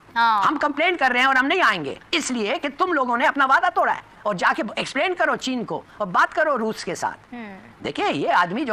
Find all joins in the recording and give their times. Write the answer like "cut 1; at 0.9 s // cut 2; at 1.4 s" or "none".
none